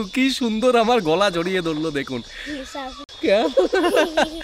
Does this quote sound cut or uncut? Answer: uncut